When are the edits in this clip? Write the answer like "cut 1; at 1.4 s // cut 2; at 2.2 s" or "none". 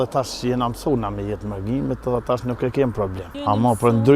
cut 1; at 3.3 s